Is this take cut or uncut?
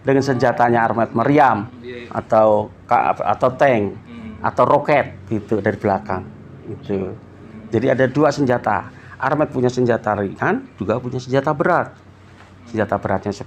uncut